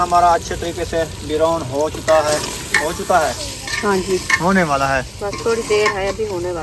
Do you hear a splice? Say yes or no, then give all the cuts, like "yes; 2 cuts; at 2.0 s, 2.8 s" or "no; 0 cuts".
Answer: no; 0 cuts